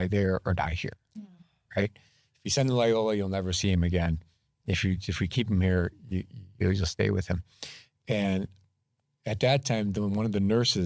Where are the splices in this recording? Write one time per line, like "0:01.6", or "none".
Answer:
none